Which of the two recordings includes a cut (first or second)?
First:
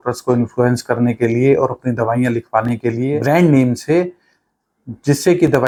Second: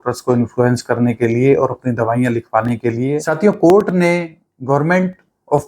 second